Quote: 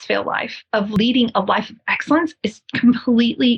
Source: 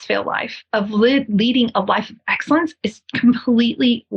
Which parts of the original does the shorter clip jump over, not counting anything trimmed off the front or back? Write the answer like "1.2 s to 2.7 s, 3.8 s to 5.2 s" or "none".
0.9 s to 1.3 s